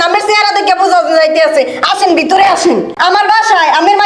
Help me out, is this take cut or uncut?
cut